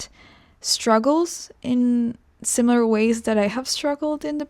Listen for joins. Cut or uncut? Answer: uncut